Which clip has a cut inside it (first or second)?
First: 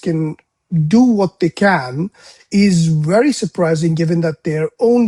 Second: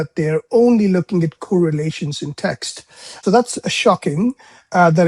second